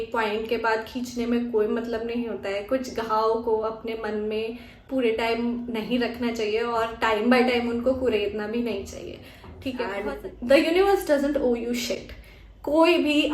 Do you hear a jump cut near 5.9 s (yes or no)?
no